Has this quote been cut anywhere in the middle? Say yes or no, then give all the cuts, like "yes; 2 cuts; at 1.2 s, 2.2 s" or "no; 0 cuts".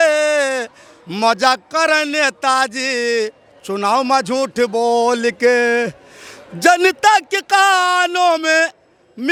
no; 0 cuts